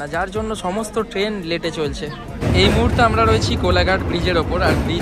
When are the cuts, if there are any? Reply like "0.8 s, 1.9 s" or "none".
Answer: 2.4 s